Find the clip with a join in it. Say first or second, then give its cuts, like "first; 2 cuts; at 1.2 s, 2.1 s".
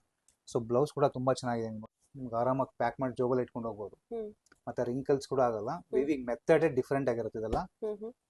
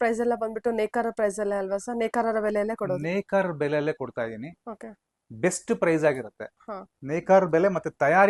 first; 1 cut; at 1.8 s